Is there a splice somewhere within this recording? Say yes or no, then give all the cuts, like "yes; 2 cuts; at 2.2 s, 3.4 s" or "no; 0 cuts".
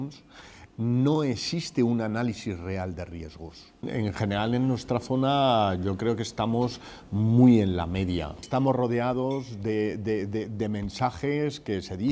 yes; 2 cuts; at 3.9 s, 8.4 s